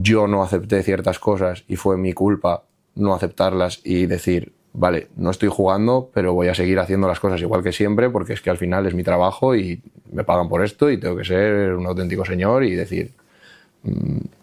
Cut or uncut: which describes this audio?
uncut